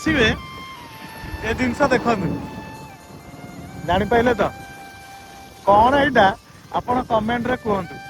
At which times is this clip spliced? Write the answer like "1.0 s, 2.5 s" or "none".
none